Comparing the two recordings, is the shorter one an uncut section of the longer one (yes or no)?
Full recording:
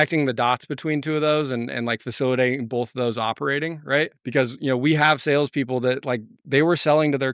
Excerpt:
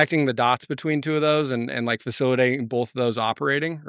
yes